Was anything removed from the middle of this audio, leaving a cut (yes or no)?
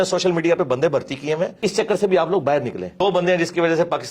yes